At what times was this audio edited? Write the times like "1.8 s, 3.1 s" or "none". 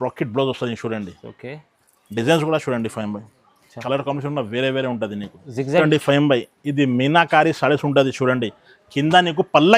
5.8 s